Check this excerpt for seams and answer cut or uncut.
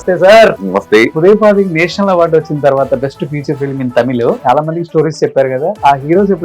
cut